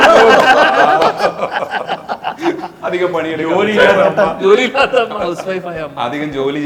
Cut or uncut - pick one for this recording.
uncut